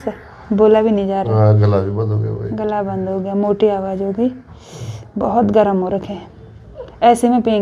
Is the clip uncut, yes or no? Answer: yes